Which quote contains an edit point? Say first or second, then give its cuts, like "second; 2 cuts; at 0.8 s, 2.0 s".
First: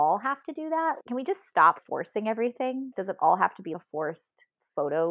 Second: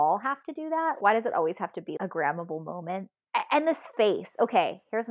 first; 2 cuts; at 1.0 s, 3.7 s